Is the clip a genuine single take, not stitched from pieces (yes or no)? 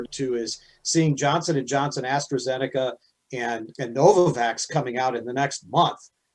yes